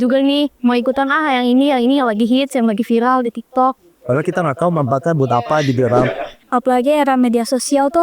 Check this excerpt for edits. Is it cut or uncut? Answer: cut